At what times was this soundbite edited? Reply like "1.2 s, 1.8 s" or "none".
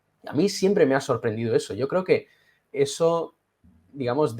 2.6 s